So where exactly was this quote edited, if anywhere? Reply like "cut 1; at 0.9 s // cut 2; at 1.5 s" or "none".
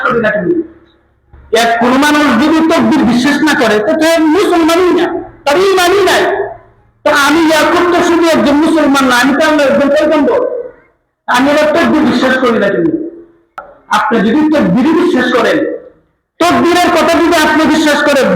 cut 1; at 13.5 s